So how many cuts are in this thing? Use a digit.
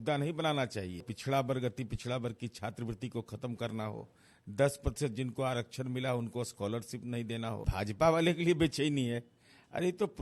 2